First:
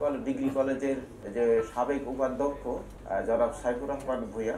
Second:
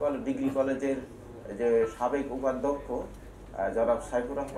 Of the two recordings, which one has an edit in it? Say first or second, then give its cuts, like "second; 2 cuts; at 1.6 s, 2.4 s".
first; 2 cuts; at 1.2 s, 2.9 s